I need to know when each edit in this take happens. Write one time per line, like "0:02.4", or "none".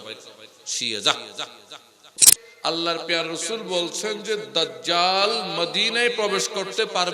0:02.5